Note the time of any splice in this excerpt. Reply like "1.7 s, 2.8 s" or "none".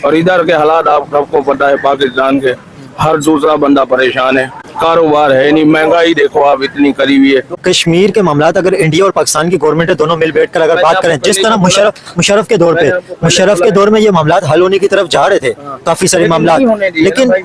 none